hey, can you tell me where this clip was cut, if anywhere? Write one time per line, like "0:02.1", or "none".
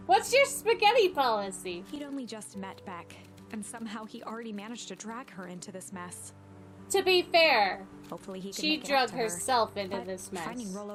none